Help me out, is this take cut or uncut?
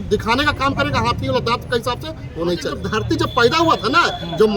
cut